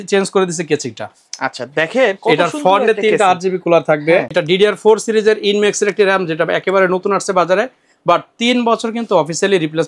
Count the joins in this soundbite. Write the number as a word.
one